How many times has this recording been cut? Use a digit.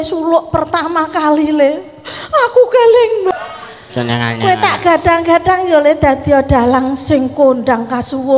1